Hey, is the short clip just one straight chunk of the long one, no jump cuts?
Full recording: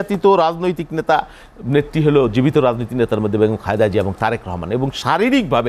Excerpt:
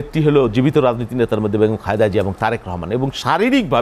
yes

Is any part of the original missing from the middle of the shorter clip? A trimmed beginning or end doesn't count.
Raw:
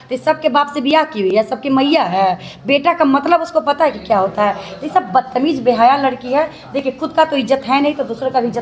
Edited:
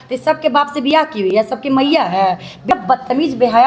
yes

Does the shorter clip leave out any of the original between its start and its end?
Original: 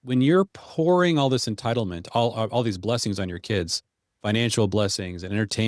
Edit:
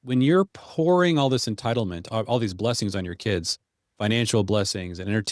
yes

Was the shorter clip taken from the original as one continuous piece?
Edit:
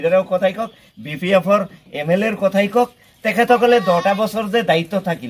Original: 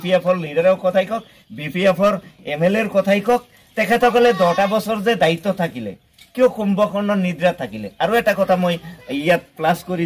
yes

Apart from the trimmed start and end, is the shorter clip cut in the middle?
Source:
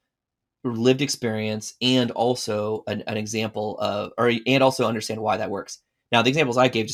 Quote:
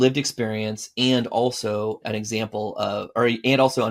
yes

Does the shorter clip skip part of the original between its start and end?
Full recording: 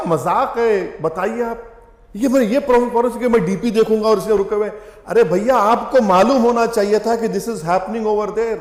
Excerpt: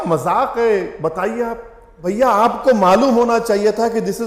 yes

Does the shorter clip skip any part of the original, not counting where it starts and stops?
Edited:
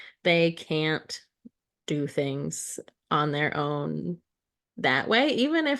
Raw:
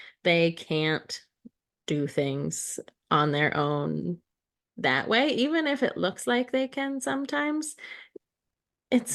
no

